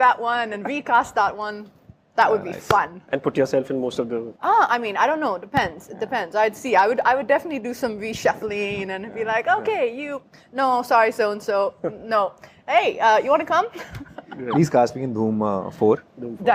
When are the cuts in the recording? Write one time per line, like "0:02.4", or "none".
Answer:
none